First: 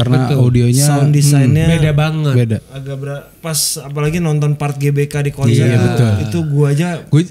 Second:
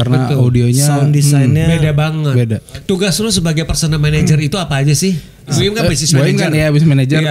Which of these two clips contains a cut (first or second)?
second